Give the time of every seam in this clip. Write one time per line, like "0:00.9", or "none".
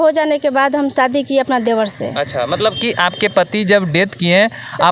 none